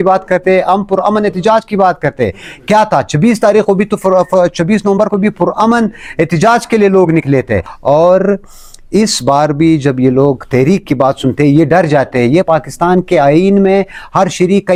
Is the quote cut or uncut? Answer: uncut